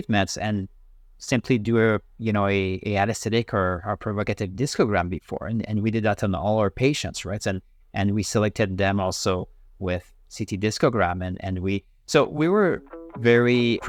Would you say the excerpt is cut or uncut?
uncut